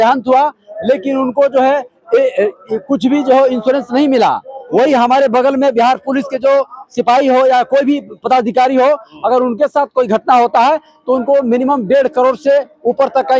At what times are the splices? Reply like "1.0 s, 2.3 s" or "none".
none

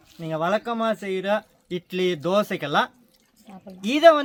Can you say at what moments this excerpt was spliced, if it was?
none

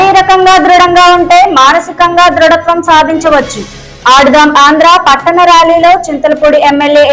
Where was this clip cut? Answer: none

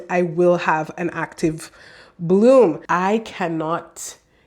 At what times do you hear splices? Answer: 2.8 s

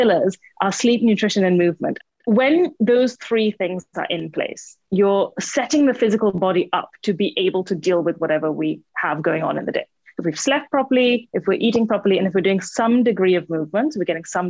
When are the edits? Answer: 1.9 s

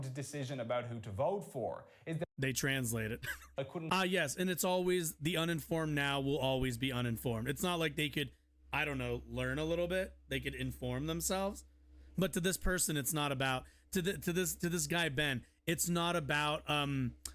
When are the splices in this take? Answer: 2.0 s, 3.4 s

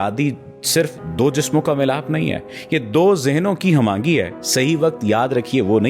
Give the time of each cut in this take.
4.4 s

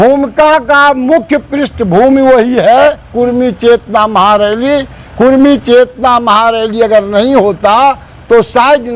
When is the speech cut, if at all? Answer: none

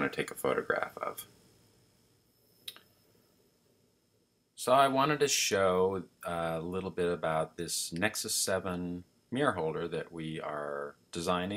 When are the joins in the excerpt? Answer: none

